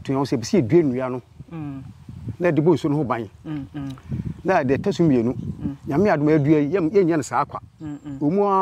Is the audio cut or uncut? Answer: uncut